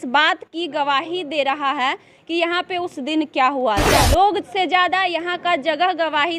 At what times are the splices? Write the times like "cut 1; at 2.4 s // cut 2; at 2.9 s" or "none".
cut 1; at 3.9 s